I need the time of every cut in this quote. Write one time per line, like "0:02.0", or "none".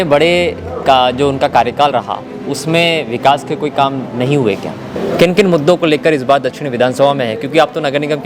0:04.9